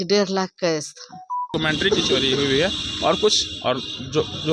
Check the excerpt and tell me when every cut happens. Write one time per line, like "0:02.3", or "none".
0:01.5